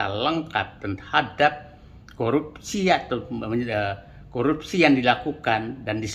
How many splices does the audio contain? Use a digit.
0